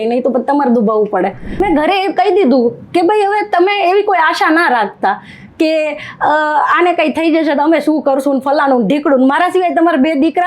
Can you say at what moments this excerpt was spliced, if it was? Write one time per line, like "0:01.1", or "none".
0:01.6